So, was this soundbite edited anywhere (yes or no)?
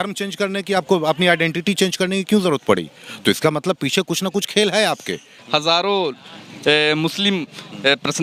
no